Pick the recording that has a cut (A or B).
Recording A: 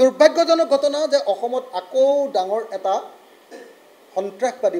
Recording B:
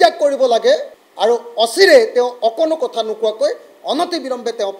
B